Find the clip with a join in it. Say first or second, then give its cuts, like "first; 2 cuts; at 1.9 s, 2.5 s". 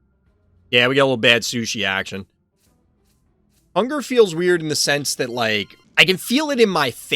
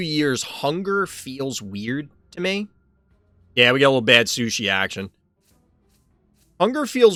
first; 1 cut; at 5.8 s